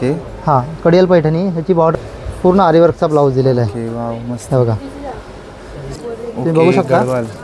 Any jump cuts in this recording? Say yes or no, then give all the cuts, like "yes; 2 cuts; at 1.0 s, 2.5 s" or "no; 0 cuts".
yes; 2 cuts; at 1.9 s, 6.0 s